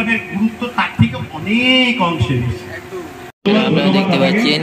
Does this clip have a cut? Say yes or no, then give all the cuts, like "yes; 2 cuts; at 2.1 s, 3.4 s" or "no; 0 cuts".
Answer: yes; 1 cut; at 3.4 s